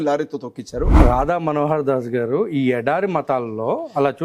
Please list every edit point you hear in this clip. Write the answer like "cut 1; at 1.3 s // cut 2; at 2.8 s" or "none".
cut 1; at 0.9 s